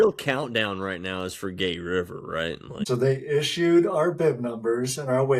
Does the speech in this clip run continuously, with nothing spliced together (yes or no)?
no